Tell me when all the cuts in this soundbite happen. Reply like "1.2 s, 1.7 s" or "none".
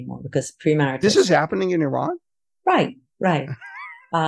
none